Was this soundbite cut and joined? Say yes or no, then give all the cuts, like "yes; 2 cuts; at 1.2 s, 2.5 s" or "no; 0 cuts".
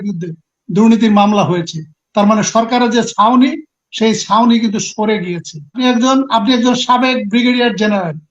yes; 1 cut; at 5.8 s